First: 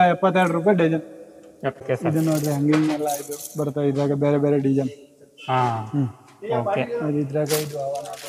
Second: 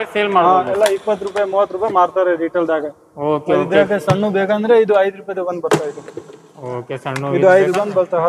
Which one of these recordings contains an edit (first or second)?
first